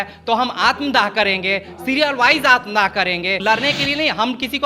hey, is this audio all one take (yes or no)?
no